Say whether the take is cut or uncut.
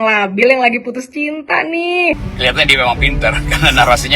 cut